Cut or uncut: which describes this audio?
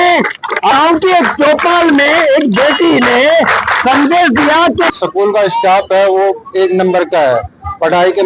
cut